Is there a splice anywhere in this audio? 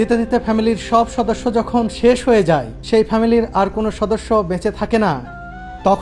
no; 0 cuts

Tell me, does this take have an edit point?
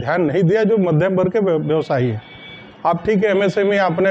no; 0 cuts

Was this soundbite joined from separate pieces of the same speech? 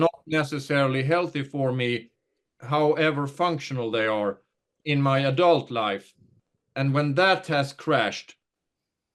yes; 2 cuts; at 2.6 s, 4.7 s

